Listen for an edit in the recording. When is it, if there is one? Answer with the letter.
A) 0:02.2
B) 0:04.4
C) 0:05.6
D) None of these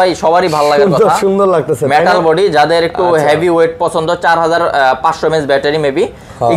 D